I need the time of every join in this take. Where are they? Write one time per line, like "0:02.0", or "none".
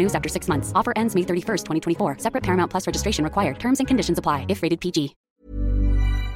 0:05.3

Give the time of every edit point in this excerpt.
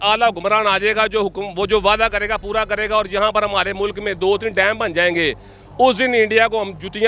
none

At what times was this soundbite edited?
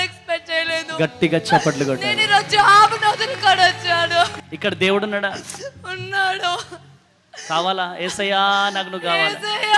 0:04.4

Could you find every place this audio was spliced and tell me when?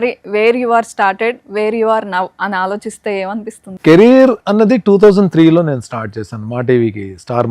0:03.6

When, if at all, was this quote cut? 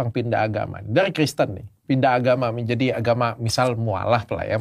none

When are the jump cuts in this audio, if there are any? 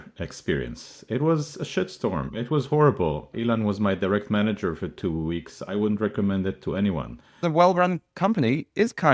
0:03.3
0:07.4

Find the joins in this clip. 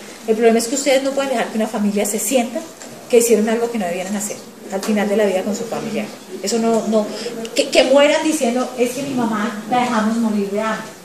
0:07.7

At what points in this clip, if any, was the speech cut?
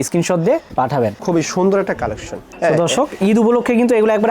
0:01.2

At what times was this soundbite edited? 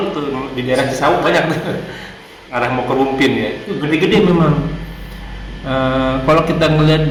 none

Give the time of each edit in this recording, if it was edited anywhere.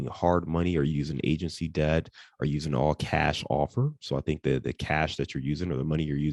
none

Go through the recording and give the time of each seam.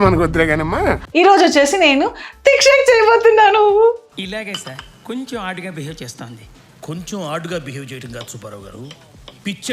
0:01.0

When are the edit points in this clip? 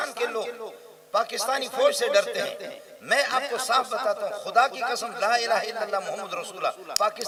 none

